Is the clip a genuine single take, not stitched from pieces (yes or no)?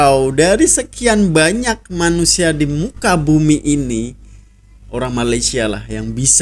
yes